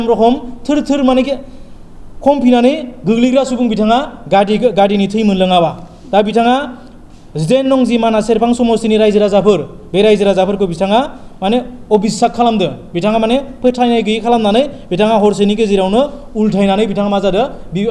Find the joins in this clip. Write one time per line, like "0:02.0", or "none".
none